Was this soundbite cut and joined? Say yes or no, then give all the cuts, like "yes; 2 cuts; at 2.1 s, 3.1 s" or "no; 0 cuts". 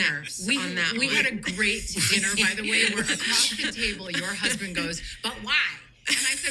no; 0 cuts